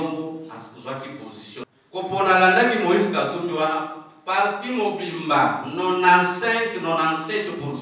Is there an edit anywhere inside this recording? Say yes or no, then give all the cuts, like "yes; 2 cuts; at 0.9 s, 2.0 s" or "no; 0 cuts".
yes; 1 cut; at 1.6 s